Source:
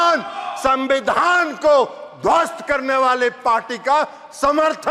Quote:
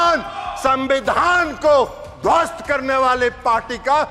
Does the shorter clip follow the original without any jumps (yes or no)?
yes